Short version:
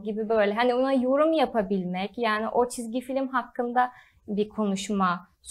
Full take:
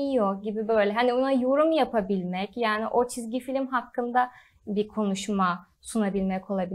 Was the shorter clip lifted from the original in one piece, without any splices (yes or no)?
yes